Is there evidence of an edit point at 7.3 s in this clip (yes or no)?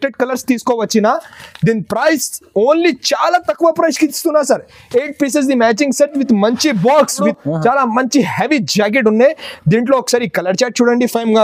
yes